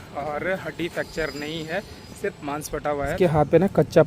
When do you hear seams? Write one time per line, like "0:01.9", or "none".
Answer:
0:03.2